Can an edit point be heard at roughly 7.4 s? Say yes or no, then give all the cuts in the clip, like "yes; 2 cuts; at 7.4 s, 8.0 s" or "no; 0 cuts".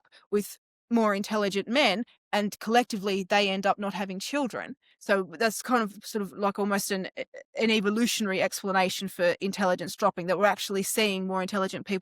no; 1 cut; at 4.9 s